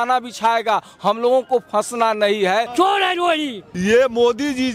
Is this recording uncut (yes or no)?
no